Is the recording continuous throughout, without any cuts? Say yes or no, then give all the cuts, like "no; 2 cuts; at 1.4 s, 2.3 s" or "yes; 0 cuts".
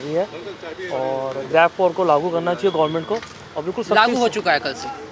yes; 0 cuts